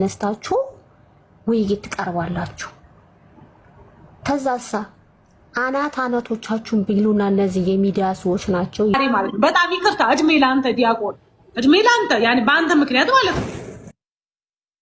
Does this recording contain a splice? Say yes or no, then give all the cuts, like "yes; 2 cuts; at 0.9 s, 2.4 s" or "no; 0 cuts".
yes; 1 cut; at 8.9 s